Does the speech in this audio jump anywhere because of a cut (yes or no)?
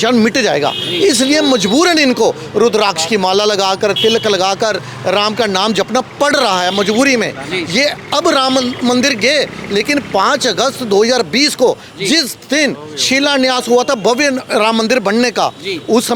no